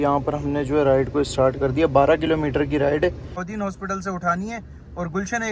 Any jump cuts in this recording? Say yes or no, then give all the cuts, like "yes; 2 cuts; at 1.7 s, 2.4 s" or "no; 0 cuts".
yes; 1 cut; at 3.5 s